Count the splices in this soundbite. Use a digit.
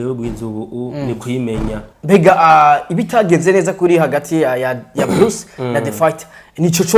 1